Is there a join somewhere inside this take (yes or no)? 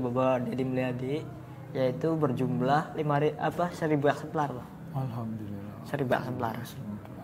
no